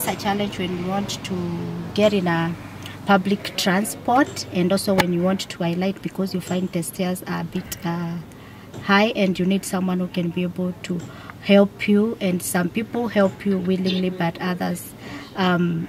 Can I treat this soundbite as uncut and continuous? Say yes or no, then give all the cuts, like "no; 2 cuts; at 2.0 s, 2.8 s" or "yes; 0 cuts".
yes; 0 cuts